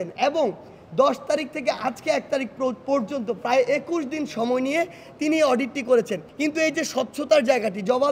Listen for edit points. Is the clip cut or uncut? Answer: cut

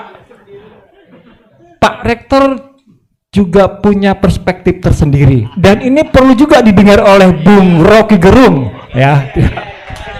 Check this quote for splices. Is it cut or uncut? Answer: uncut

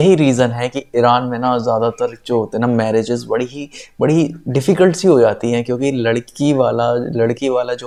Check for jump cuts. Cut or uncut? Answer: uncut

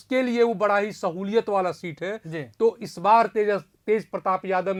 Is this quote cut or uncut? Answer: uncut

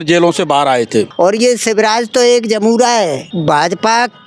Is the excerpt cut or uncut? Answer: cut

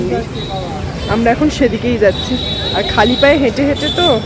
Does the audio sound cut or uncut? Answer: uncut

